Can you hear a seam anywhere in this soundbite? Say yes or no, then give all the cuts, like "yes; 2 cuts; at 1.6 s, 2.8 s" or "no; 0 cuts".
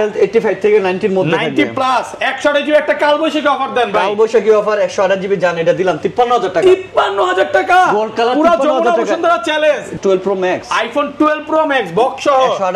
yes; 1 cut; at 10.0 s